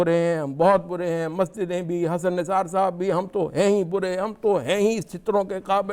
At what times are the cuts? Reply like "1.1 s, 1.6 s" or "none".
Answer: none